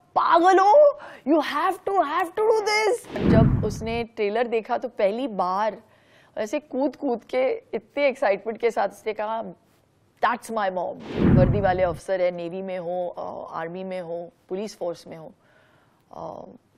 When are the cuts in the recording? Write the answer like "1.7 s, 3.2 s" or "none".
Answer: 3.2 s, 11.1 s

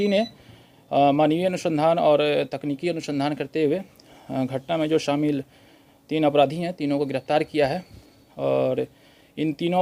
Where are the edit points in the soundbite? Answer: none

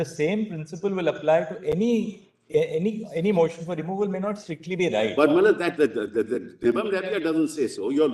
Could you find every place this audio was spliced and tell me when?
none

